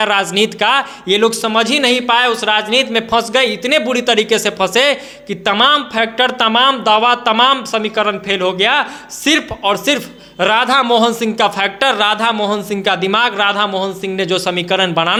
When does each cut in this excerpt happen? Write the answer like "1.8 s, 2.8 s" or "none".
none